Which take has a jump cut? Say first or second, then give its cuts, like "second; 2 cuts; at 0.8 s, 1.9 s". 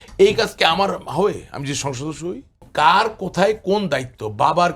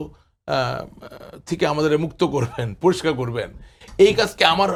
first; 1 cut; at 2.7 s